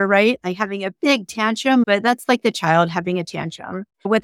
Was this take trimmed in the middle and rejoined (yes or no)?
yes